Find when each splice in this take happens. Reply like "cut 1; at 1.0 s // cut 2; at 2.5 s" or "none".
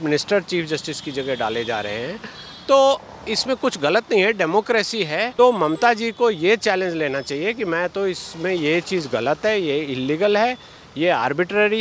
cut 1; at 5.3 s